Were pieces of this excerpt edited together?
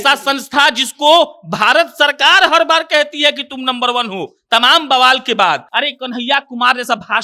yes; 1 cut; at 5.7 s

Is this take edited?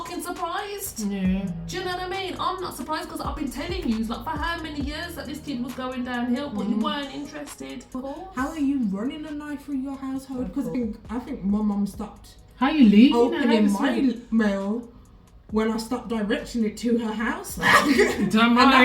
yes; 2 cuts; at 7.9 s, 10.8 s

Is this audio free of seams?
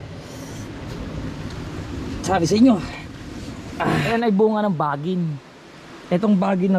no; 1 cut; at 4.1 s

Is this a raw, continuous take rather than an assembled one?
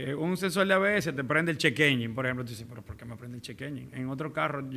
yes; 0 cuts

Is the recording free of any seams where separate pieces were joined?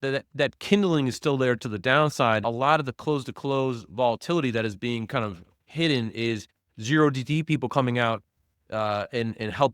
no; 1 cut; at 2.4 s

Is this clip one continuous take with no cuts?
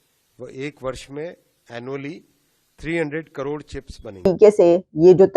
no; 1 cut; at 4.0 s

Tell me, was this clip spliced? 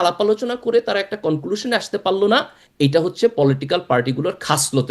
no; 0 cuts

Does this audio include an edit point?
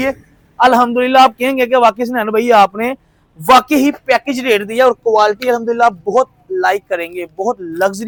no; 0 cuts

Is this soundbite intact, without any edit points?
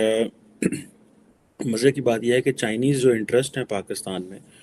yes; 0 cuts

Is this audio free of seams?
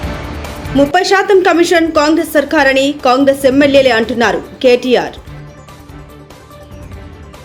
yes; 0 cuts

